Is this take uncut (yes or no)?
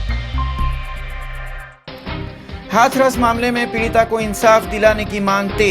no